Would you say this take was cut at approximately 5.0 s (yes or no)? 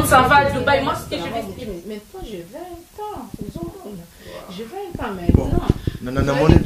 no